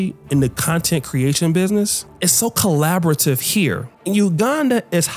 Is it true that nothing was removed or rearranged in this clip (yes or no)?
no